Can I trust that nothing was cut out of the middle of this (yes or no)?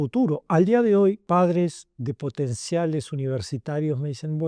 no